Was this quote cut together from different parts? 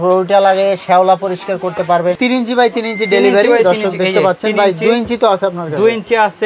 yes; 1 cut; at 2.2 s

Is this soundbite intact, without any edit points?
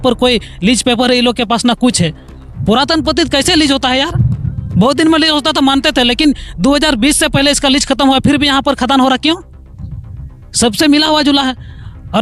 yes; 0 cuts

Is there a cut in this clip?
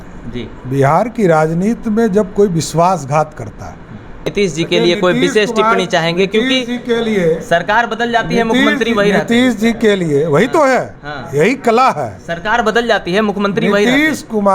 yes; 1 cut; at 4.3 s

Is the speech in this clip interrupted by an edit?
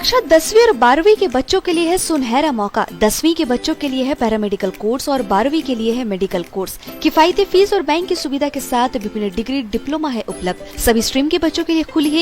no; 0 cuts

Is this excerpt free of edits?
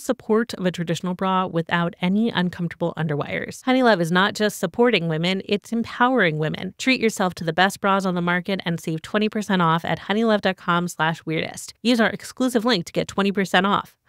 no; 1 cut; at 3.5 s

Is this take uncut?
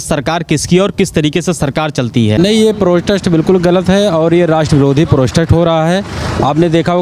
no; 1 cut; at 2.4 s

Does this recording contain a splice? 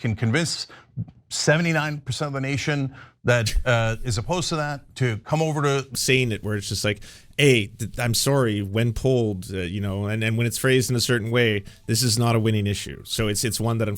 yes; 1 cut; at 6.0 s

